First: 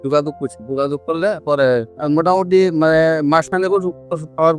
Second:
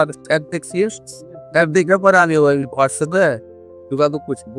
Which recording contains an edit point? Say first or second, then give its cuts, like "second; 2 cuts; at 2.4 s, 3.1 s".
first; 1 cut; at 1.9 s